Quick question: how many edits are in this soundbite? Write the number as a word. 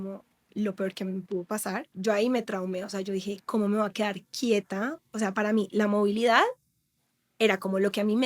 one